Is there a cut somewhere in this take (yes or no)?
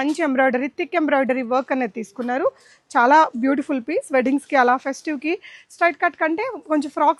no